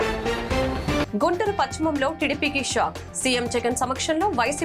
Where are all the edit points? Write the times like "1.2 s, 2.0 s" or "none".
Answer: 1.1 s